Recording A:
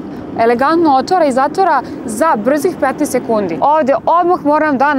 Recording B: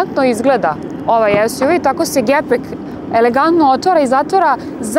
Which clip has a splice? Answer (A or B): A